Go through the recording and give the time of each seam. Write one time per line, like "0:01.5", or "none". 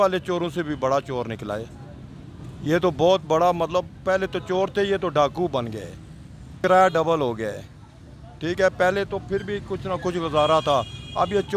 0:06.6